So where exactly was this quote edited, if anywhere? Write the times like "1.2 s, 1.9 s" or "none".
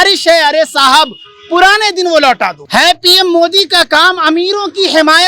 2.6 s